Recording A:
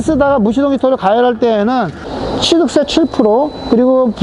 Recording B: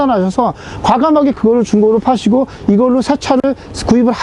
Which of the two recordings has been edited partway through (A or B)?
A